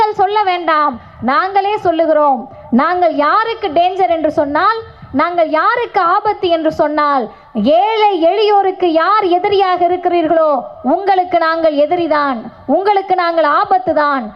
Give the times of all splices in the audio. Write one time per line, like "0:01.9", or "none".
none